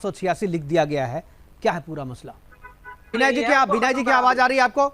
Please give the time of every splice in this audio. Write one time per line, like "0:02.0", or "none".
0:03.2